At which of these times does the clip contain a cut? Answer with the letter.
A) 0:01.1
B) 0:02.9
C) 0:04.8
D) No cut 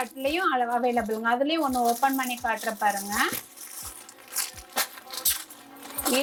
D